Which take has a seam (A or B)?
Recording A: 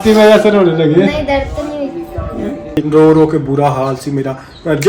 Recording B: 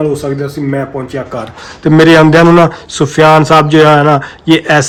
A